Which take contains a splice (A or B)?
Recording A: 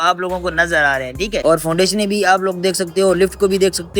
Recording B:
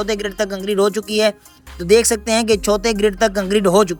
A